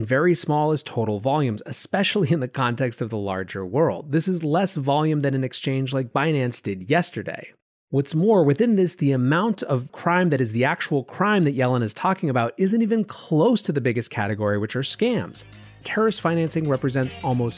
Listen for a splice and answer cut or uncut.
cut